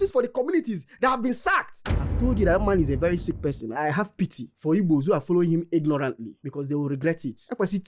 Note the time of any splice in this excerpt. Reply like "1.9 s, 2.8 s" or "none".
1.8 s